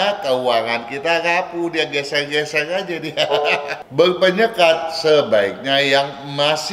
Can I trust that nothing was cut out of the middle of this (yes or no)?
no